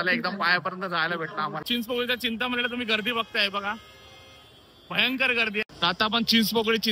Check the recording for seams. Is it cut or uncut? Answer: cut